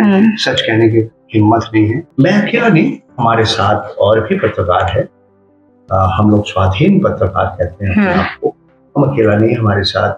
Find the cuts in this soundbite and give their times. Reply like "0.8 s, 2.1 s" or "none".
2.1 s